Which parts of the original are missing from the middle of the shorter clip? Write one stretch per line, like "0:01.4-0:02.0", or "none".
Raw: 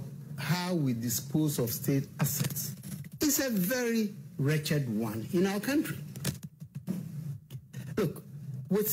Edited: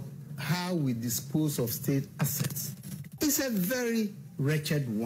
none